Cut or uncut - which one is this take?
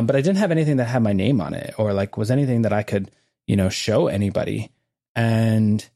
uncut